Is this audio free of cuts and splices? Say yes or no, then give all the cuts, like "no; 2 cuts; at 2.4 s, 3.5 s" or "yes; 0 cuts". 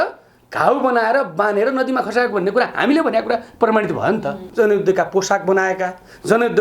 no; 1 cut; at 4.4 s